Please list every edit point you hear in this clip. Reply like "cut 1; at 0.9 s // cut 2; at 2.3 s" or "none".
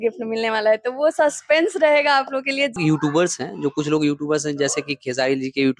cut 1; at 2.8 s